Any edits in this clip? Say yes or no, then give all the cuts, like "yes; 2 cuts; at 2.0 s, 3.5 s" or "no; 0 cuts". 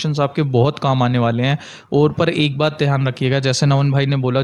no; 0 cuts